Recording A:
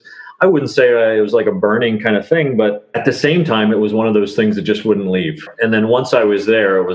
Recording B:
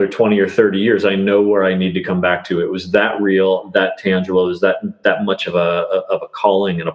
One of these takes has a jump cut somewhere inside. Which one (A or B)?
A